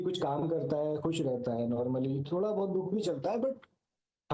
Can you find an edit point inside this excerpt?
no; 0 cuts

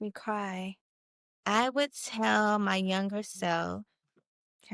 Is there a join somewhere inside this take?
no; 0 cuts

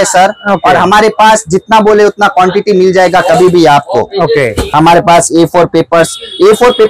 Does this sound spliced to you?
no; 0 cuts

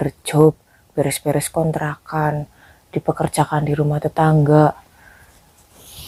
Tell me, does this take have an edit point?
no; 0 cuts

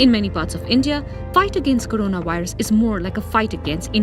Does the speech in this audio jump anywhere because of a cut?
no; 0 cuts

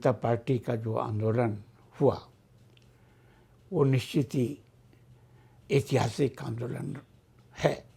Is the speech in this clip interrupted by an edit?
no; 0 cuts

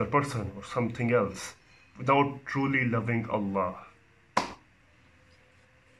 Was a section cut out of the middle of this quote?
no; 0 cuts

